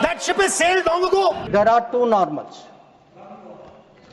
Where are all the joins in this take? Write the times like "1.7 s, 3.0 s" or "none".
1.4 s